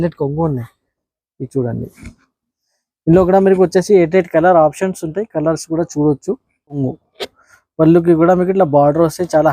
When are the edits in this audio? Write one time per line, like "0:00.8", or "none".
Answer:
0:06.8